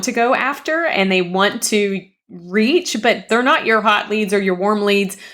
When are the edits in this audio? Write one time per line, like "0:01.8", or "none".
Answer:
0:03.2